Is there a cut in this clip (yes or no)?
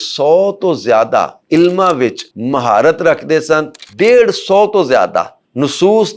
yes